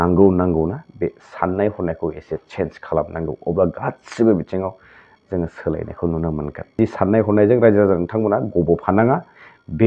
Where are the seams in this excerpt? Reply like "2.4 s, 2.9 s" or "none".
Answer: 6.8 s